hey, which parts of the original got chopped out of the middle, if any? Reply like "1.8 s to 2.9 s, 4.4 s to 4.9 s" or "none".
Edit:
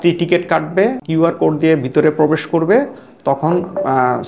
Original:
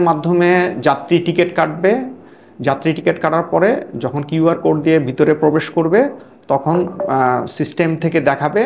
2.1 s to 4.3 s